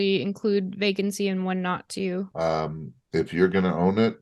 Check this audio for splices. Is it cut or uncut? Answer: uncut